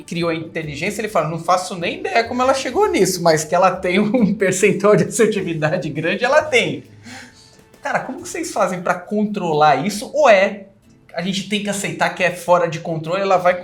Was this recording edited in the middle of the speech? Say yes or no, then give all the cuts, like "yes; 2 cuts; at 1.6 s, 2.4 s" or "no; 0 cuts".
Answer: no; 0 cuts